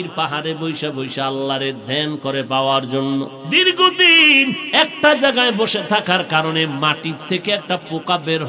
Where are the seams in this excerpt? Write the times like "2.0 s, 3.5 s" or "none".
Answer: 3.4 s